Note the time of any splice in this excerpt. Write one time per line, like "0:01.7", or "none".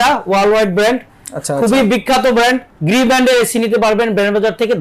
0:02.7